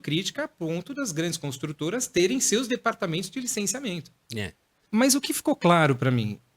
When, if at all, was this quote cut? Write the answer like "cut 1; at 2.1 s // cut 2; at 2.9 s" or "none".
cut 1; at 4.8 s